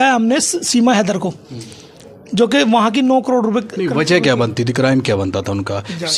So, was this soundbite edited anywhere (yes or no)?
no